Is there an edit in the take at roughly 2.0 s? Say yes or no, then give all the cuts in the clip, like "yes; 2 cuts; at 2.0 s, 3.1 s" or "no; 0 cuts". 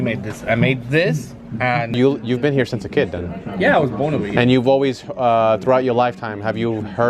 yes; 1 cut; at 2.0 s